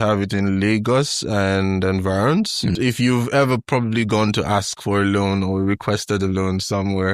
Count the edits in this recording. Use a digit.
1